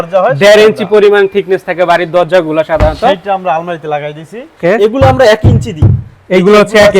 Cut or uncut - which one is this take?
cut